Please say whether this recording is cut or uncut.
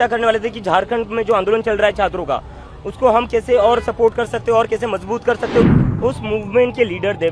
cut